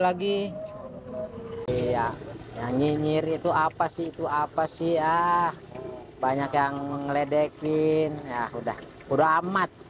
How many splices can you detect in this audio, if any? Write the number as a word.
one